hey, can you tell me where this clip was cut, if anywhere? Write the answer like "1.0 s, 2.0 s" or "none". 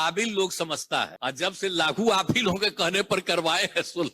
1.1 s